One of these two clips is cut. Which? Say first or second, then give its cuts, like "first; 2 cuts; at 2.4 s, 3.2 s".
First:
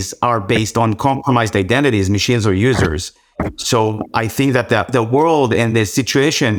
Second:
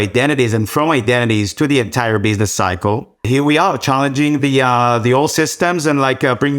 second; 1 cut; at 3.3 s